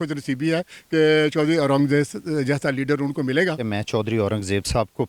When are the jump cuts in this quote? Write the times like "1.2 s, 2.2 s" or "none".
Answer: 3.6 s